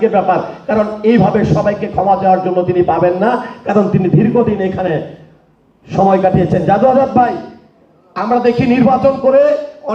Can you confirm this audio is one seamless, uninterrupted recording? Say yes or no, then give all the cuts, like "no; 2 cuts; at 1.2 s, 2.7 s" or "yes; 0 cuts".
yes; 0 cuts